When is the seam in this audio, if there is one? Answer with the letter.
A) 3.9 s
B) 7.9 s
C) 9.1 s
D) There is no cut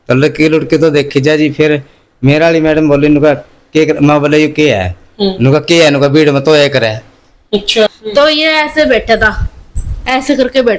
B